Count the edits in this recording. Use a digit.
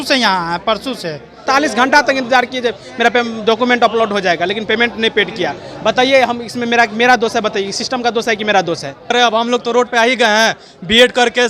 2